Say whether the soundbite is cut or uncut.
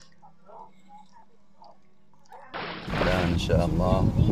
cut